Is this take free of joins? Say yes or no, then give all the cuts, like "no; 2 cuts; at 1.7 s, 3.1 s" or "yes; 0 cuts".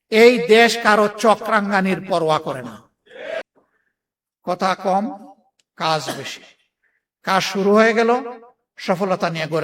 no; 1 cut; at 3.4 s